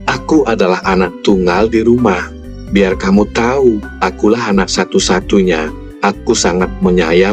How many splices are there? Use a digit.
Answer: 0